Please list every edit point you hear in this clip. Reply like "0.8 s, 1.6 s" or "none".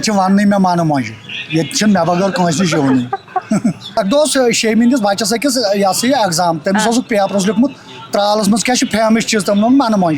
4.0 s